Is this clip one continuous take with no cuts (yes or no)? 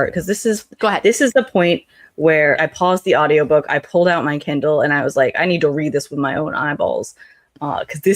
no